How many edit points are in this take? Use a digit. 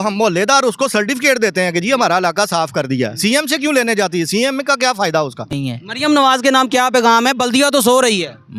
1